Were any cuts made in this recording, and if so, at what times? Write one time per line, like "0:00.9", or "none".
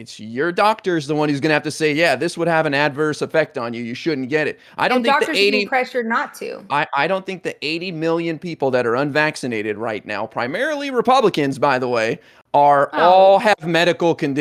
none